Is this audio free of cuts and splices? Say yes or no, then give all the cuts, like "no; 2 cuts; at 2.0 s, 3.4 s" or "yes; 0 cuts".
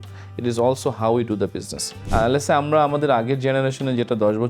no; 1 cut; at 2.0 s